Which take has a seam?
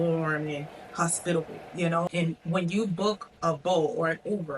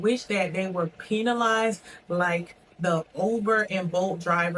first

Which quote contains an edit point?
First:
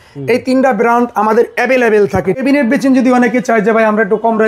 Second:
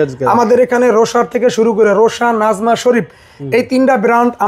first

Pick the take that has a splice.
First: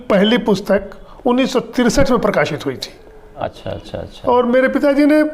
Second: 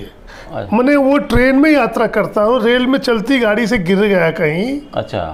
first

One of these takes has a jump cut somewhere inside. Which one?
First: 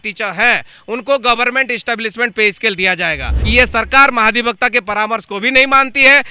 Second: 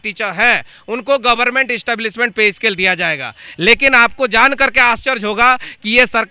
first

